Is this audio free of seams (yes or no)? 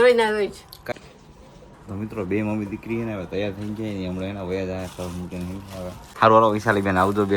no